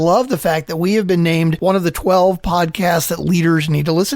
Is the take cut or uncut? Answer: cut